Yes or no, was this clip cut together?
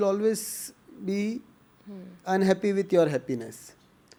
no